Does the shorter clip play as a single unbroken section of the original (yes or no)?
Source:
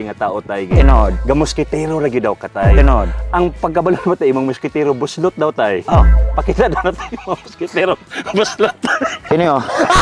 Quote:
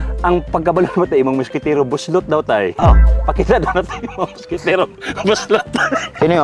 yes